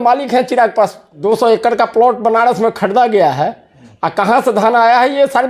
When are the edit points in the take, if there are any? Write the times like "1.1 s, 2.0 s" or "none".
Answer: 1.1 s